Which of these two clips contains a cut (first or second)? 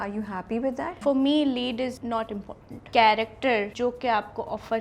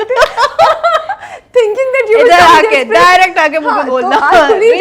first